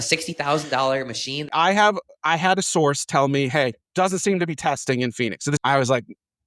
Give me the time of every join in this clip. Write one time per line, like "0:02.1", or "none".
0:01.4
0:03.8
0:05.6